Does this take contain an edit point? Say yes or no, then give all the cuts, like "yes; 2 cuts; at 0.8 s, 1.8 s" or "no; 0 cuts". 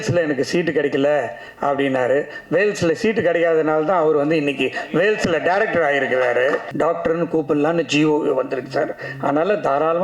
yes; 1 cut; at 6.7 s